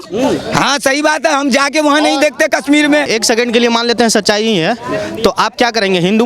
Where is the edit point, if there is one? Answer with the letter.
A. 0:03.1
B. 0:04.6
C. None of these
A